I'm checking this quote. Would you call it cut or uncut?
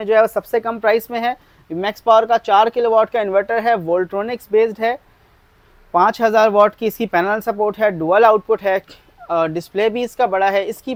uncut